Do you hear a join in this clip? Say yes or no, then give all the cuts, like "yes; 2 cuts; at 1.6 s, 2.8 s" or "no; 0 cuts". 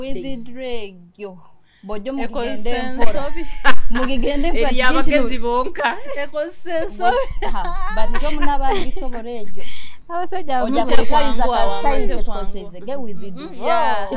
no; 0 cuts